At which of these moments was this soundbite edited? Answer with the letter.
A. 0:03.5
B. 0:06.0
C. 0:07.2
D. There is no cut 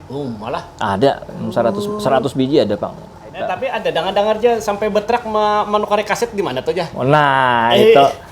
A